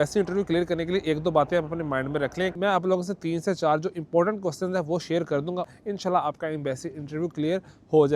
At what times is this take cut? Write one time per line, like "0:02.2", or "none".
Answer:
0:02.5
0:05.7